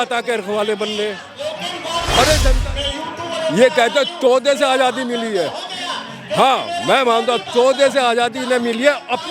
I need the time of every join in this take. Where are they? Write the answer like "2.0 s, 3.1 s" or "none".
2.6 s